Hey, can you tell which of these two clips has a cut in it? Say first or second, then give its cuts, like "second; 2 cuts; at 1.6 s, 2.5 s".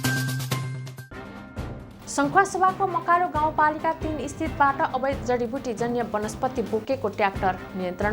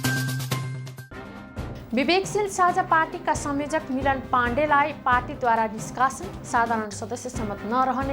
second; 1 cut; at 1.7 s